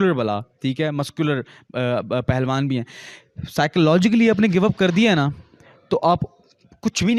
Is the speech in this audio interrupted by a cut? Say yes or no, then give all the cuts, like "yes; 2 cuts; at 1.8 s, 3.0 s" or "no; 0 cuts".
no; 0 cuts